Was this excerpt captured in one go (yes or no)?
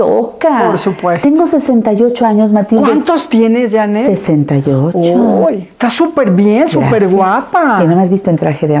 yes